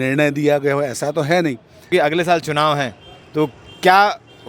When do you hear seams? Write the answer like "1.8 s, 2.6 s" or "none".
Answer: 1.8 s